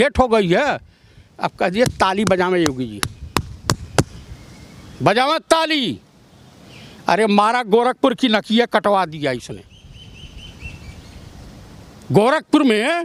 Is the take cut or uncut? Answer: uncut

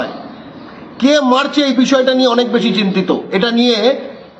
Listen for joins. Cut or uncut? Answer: uncut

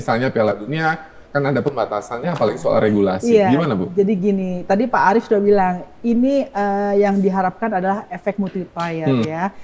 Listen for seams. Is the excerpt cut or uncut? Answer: uncut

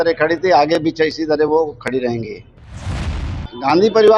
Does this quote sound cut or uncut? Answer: cut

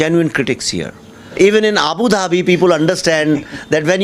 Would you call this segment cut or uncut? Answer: cut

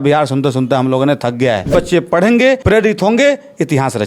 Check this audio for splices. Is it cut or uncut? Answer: cut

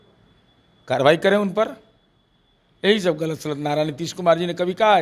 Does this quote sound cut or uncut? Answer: uncut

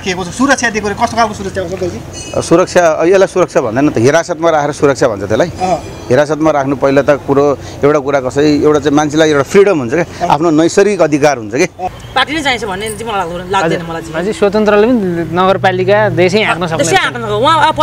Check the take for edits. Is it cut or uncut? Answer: cut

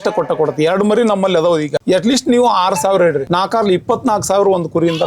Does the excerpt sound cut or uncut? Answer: cut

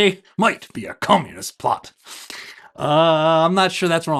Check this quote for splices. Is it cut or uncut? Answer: uncut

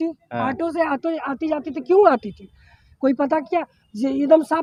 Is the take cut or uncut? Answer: uncut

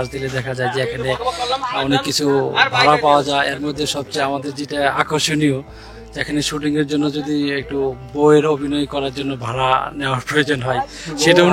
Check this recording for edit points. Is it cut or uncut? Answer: uncut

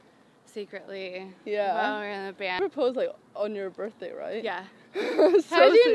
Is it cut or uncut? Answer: cut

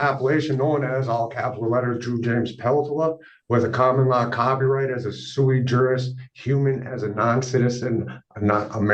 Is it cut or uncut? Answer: uncut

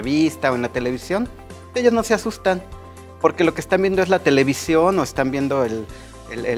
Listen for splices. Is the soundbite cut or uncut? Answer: uncut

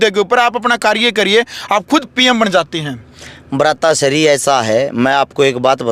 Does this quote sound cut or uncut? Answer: uncut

